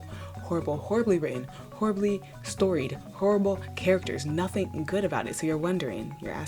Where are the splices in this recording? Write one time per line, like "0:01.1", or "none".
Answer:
none